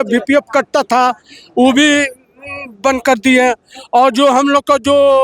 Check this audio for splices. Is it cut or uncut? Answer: uncut